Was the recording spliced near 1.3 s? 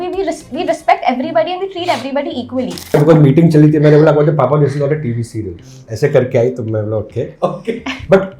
no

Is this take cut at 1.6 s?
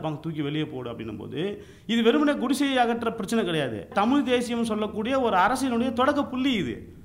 no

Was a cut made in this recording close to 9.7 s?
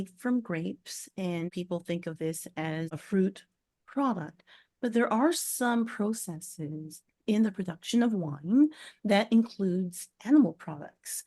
no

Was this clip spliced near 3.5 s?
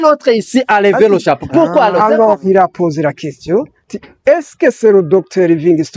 no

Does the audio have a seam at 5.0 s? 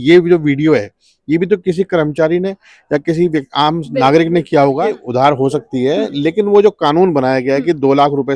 yes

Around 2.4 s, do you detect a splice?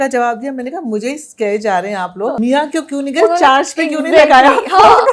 yes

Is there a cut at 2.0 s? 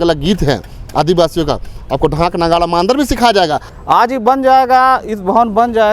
no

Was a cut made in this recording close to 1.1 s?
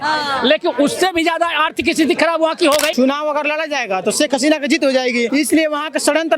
no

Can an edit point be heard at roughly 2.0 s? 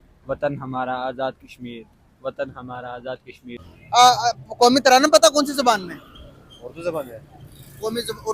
no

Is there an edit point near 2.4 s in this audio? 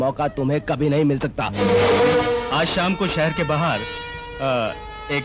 yes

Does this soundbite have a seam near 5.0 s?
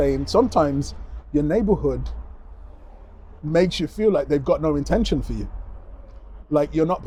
no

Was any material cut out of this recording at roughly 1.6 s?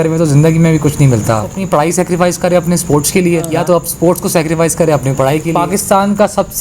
yes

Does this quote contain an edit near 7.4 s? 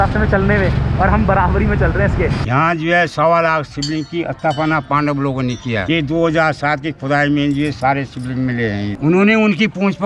no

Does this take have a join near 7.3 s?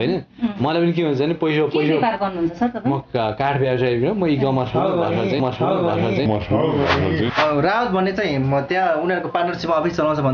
yes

